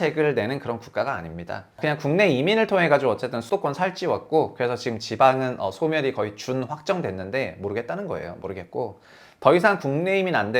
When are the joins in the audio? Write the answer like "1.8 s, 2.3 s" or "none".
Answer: 1.8 s, 3.4 s